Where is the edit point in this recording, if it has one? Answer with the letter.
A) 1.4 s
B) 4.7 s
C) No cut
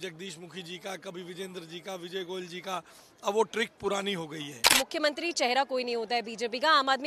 B